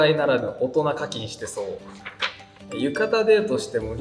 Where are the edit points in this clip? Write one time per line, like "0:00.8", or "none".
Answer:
0:02.7